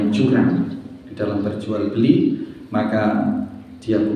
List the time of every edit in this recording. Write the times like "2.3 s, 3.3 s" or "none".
none